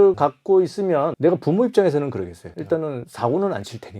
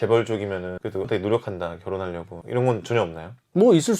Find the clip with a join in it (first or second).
first